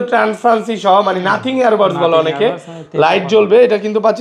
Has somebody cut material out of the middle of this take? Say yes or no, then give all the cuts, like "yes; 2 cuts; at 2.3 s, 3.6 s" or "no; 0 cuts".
no; 0 cuts